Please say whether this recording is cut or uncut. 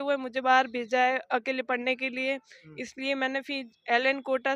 uncut